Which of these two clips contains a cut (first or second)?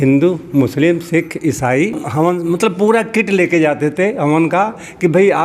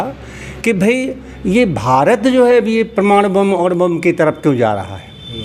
first